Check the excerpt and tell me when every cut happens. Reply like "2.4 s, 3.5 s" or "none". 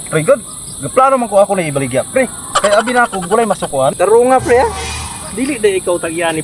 3.9 s